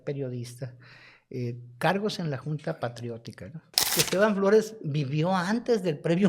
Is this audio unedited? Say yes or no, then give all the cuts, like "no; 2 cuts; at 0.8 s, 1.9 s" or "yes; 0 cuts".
no; 1 cut; at 4.0 s